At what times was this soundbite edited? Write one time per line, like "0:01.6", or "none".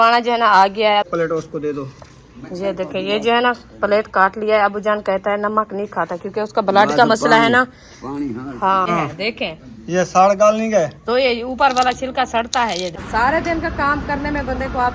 0:01.1
0:08.9
0:13.0